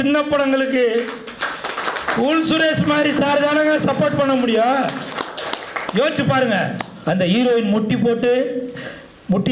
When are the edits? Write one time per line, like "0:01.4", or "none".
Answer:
0:06.9